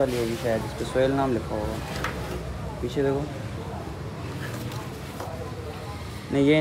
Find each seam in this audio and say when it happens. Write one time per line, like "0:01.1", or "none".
none